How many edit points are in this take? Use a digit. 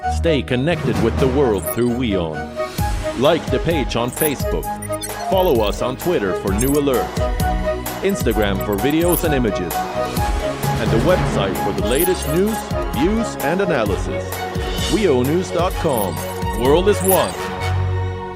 0